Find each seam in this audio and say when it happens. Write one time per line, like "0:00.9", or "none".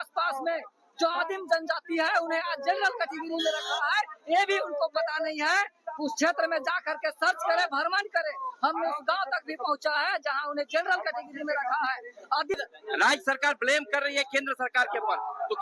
0:12.6